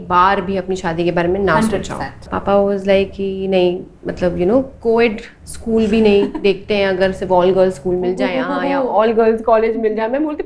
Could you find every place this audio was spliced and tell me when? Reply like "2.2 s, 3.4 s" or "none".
2.3 s